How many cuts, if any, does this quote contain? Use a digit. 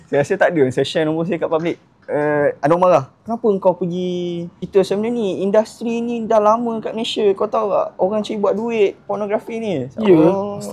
1